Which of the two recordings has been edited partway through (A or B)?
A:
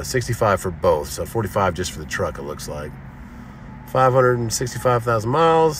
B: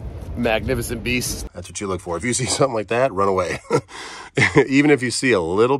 B